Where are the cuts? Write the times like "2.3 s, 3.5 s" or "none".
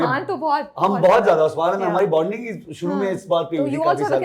none